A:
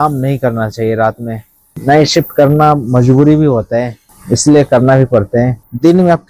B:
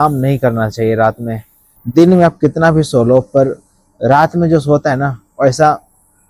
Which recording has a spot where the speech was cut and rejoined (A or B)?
B